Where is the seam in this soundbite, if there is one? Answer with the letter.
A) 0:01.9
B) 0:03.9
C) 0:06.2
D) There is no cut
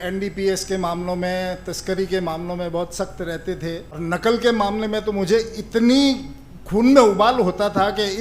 B